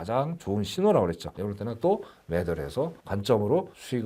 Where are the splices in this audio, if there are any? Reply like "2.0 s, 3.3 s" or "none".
1.3 s